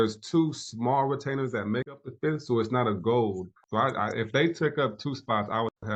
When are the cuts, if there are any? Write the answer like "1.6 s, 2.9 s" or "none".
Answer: none